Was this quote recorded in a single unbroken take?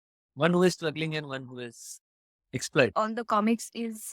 no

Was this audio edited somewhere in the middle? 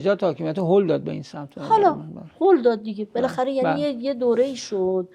no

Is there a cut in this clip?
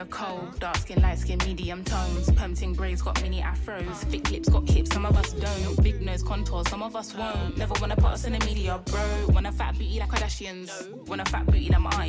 no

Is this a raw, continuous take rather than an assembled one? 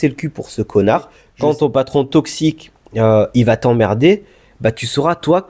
no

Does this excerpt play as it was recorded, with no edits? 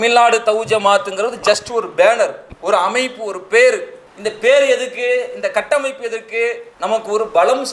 no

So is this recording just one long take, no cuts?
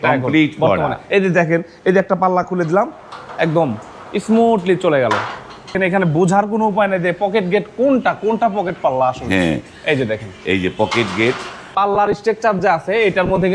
no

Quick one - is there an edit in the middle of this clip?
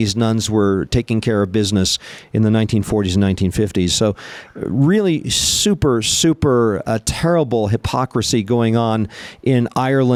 no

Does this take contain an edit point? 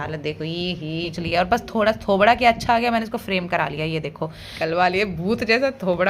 yes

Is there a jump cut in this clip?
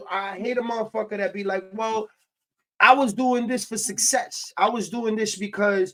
no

